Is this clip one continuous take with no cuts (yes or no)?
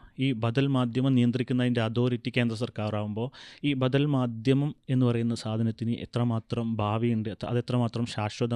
yes